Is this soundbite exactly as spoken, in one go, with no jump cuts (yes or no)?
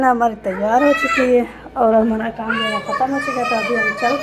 yes